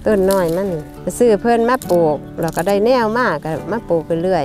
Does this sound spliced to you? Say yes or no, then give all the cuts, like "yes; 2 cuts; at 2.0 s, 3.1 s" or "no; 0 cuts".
no; 0 cuts